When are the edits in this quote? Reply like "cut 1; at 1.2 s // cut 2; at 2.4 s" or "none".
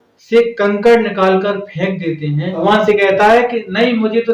cut 1; at 2.5 s